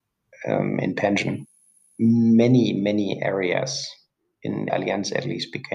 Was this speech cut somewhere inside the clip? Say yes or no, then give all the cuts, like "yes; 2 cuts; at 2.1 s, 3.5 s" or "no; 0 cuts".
yes; 1 cut; at 4.7 s